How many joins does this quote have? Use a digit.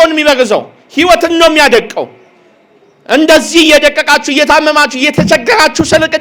0